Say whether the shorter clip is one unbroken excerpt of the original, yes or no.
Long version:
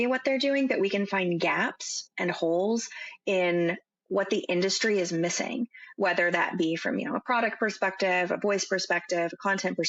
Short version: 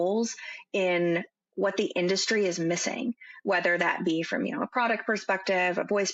yes